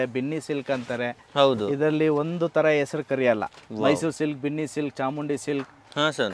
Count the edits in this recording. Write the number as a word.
zero